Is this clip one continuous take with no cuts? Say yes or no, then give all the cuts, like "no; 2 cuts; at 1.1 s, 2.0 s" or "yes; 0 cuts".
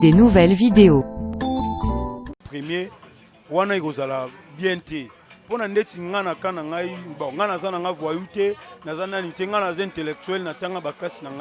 no; 1 cut; at 2.4 s